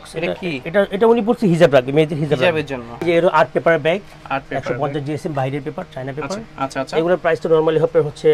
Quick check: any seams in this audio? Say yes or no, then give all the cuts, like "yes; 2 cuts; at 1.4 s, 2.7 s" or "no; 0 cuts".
yes; 1 cut; at 3.0 s